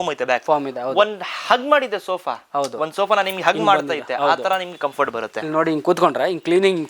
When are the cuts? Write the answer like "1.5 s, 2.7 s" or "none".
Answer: none